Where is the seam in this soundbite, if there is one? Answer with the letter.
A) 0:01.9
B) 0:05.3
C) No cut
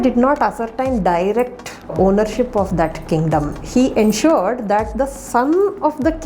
A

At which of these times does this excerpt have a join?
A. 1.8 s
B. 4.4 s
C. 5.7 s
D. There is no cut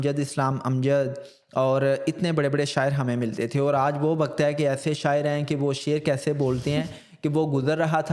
D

